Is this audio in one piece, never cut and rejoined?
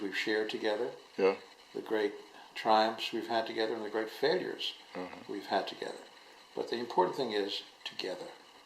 no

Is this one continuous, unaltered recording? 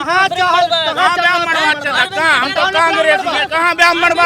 yes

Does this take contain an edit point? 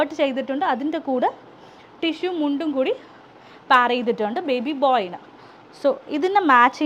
no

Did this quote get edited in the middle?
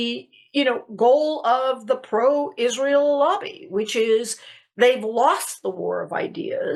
no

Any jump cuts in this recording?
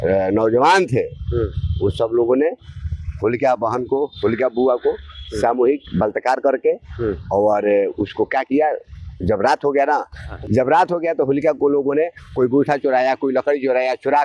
yes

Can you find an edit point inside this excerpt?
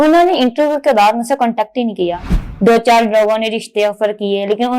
yes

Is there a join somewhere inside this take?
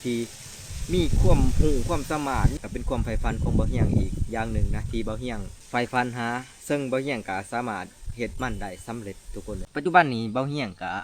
yes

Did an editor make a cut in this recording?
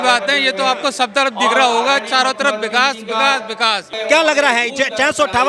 yes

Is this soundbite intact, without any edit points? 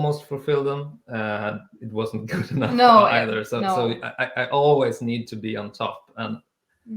yes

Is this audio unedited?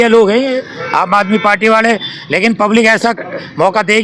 yes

